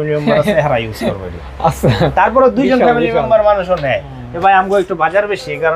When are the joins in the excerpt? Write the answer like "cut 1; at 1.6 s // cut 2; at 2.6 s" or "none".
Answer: none